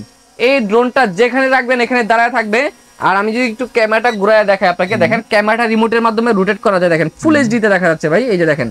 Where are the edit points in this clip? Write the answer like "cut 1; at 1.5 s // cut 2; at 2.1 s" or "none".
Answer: none